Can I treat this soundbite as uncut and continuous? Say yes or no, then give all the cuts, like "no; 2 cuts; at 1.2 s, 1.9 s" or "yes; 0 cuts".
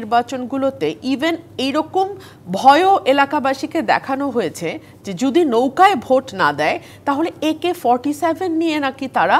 yes; 0 cuts